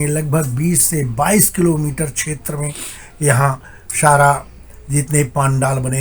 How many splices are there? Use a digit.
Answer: 0